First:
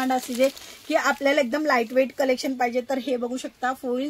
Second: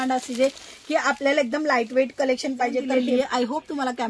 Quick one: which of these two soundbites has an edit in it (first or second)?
second